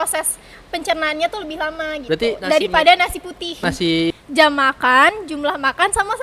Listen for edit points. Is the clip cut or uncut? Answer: cut